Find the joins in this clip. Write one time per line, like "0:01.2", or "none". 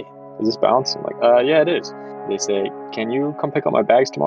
0:01.1
0:02.4